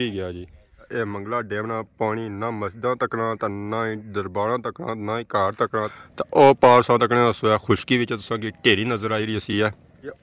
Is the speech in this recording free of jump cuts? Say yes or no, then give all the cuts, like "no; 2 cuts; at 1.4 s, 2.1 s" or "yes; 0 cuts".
no; 2 cuts; at 0.8 s, 6.0 s